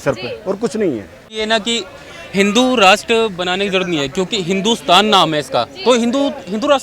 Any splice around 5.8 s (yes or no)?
no